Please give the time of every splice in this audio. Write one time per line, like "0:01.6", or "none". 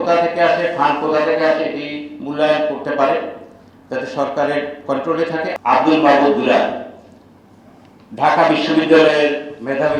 none

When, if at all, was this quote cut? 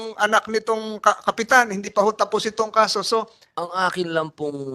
0:03.4

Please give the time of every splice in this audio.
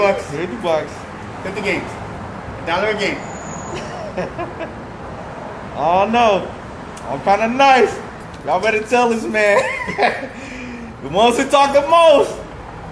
none

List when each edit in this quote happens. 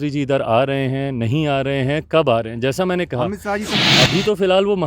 0:03.7

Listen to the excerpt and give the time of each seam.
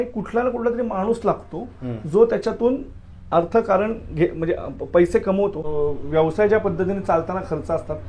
0:05.6

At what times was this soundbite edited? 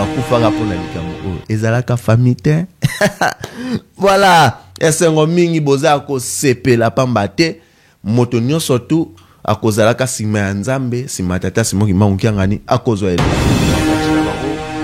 0:13.2

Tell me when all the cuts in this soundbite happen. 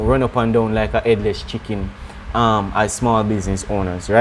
none

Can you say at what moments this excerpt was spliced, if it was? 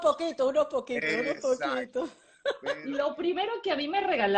0:02.7

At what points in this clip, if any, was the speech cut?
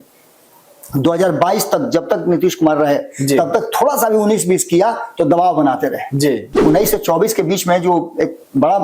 0:06.5

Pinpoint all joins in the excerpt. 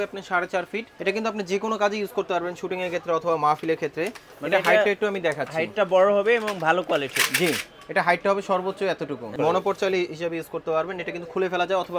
0:00.9
0:09.3

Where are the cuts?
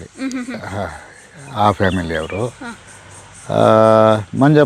none

